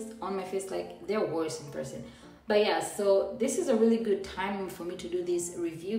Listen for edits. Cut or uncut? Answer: uncut